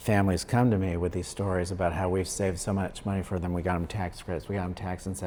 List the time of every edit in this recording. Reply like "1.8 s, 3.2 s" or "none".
none